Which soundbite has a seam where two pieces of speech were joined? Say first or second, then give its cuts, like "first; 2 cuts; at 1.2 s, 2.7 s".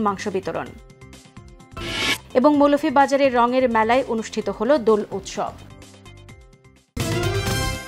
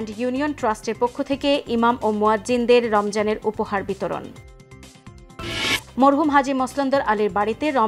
first; 1 cut; at 6.9 s